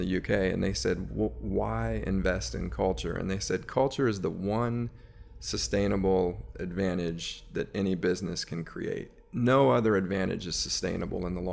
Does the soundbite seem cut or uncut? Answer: uncut